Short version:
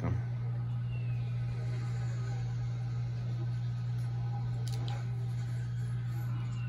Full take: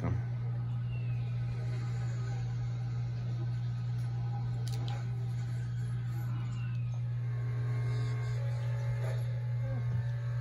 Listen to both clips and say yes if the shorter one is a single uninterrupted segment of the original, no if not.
yes